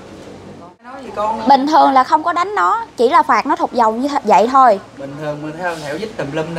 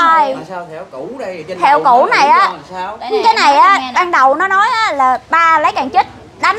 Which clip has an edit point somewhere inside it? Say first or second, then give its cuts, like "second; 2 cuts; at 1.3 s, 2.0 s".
first; 1 cut; at 0.9 s